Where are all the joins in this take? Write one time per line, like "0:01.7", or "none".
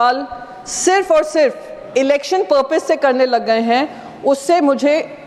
none